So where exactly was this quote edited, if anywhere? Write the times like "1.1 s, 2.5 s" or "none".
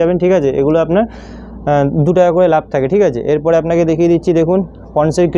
none